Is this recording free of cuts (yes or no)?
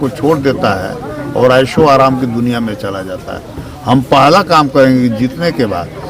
yes